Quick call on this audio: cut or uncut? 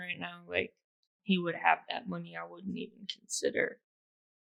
uncut